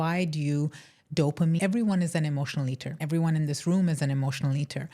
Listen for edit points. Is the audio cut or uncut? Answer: cut